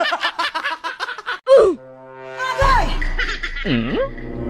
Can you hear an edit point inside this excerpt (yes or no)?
yes